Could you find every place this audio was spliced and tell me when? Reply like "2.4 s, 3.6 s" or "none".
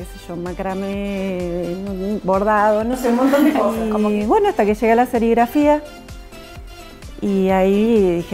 3.8 s